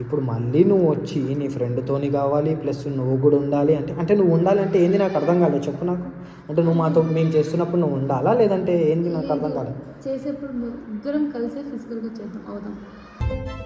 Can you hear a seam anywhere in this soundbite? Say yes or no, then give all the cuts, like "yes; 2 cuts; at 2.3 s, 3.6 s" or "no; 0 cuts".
no; 0 cuts